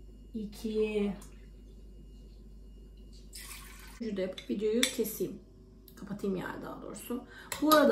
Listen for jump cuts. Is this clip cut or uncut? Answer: cut